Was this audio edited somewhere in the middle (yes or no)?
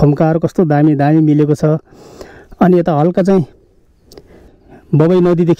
yes